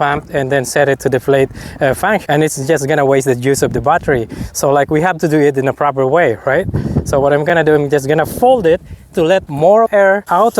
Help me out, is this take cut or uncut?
uncut